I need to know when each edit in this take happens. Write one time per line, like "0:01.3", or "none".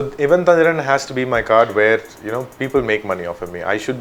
none